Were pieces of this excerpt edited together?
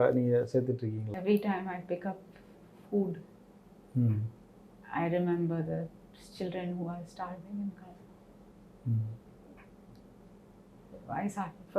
yes; 1 cut; at 1.1 s

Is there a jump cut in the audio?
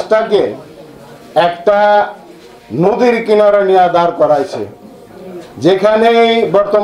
no; 0 cuts

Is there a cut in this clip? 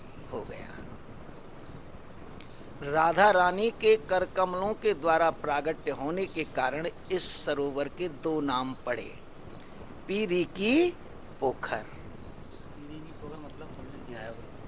no; 0 cuts

